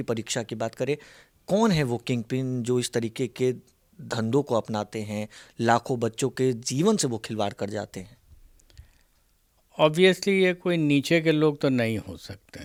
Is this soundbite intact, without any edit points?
yes; 0 cuts

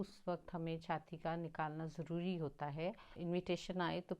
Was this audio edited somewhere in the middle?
yes; 1 cut; at 3.1 s

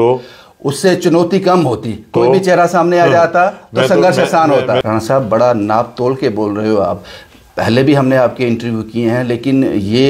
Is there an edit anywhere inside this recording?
yes; 1 cut; at 4.8 s

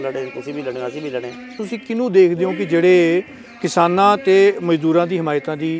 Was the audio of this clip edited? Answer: yes; 1 cut; at 1.6 s

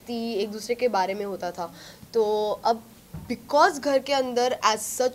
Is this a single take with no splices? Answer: yes; 0 cuts

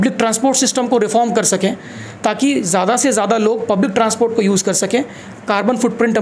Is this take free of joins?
yes; 0 cuts

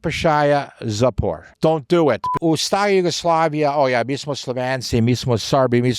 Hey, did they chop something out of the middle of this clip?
yes; 2 cuts; at 1.5 s, 2.3 s

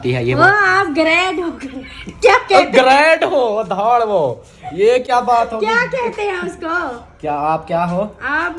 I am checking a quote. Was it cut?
no; 0 cuts

